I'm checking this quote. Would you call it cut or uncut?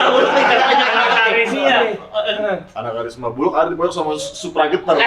cut